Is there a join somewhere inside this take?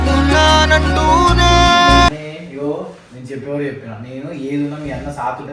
yes; 1 cut; at 2.3 s

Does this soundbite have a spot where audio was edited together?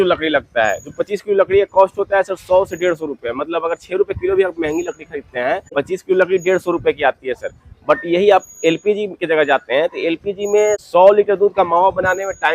yes; 2 cuts; at 5.7 s, 10.8 s

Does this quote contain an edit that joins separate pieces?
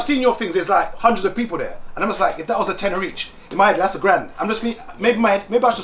no; 0 cuts

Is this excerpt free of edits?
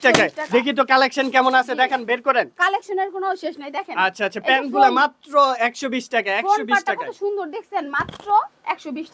yes; 0 cuts

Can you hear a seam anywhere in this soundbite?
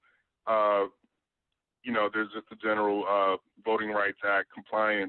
yes; 1 cut; at 2.1 s

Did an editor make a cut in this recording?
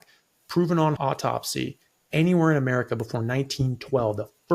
yes; 1 cut; at 1.0 s

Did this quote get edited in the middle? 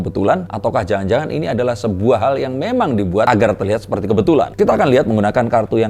no; 0 cuts

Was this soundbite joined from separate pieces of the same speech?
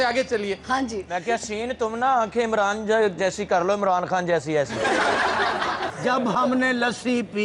yes; 1 cut; at 5.9 s

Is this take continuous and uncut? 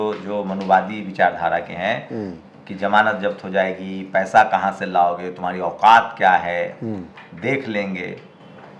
yes; 0 cuts

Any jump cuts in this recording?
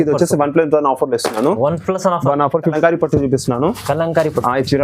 yes; 1 cut; at 2.7 s

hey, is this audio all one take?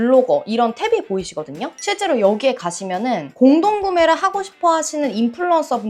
yes; 0 cuts

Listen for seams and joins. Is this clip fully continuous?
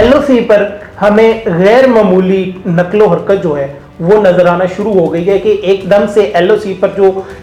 yes; 0 cuts

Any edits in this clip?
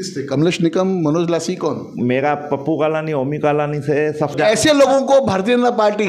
yes; 1 cut; at 4.4 s

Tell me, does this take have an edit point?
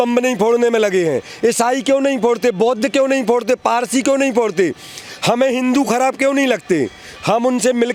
no; 0 cuts

